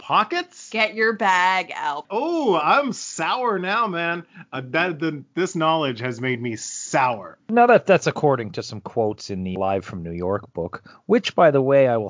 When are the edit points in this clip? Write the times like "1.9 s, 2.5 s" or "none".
2.0 s, 7.3 s, 9.5 s